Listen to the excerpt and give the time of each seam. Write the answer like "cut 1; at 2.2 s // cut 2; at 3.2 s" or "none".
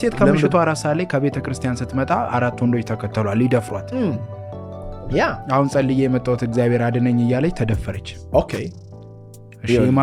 none

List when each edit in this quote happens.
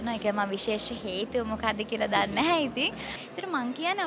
cut 1; at 3.1 s

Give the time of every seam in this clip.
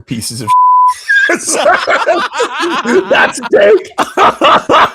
cut 1; at 4.0 s

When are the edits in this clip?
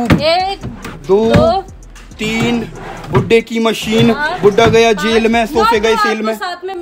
none

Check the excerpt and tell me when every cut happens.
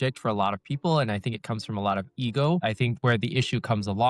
cut 1; at 2.9 s

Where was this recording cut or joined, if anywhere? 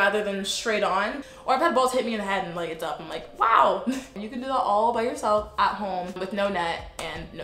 cut 1; at 1.3 s // cut 2; at 4.1 s // cut 3; at 6.2 s

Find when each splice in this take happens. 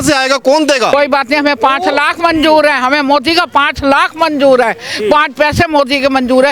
cut 1; at 0.9 s

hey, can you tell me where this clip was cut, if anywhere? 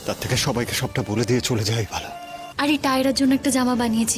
cut 1; at 2.4 s

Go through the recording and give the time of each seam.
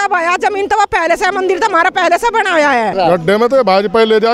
cut 1; at 2.9 s

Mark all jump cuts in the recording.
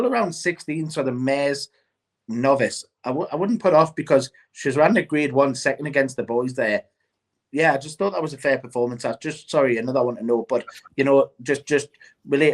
none

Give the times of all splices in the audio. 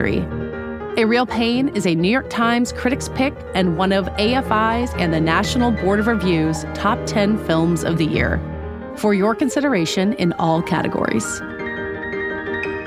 none

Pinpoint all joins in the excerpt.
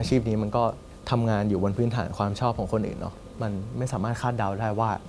cut 1; at 0.9 s

